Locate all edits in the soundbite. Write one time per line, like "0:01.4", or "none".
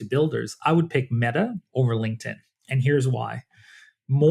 none